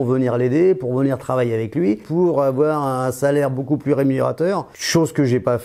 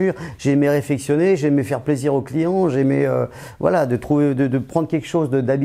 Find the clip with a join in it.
first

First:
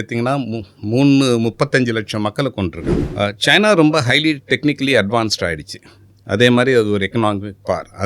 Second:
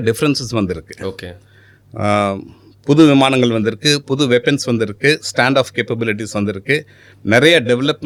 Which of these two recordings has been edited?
first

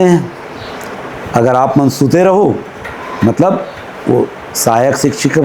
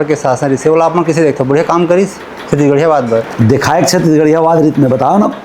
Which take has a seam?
second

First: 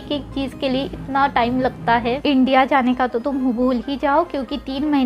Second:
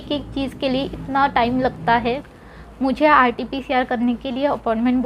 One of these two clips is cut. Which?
first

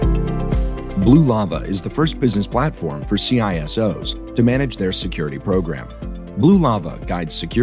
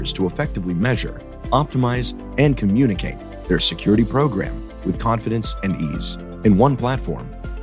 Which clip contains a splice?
first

